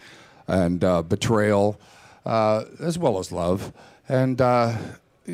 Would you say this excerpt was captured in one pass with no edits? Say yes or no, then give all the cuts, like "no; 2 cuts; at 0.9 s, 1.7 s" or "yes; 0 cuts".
yes; 0 cuts